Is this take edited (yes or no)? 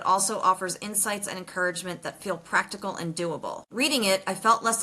yes